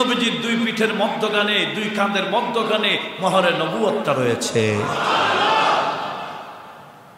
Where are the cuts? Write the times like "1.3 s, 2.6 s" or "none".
none